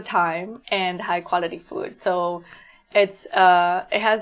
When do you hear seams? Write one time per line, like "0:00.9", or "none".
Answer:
none